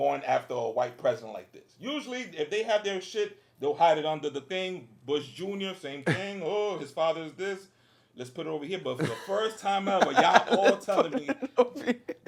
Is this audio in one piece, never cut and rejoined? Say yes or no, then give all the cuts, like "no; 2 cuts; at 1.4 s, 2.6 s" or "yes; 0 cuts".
yes; 0 cuts